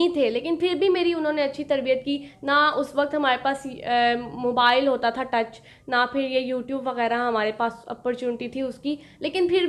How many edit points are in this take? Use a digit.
0